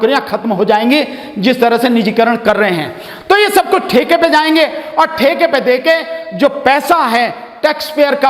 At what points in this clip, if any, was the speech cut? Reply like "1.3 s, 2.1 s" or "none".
none